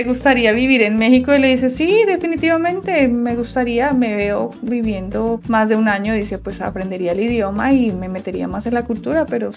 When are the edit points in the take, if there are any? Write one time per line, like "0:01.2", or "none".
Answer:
none